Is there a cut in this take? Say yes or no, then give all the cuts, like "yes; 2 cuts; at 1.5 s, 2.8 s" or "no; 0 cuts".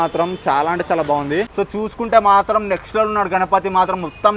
yes; 1 cut; at 1.5 s